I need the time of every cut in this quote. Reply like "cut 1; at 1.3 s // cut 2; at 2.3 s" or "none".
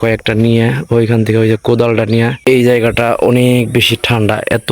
cut 1; at 2.4 s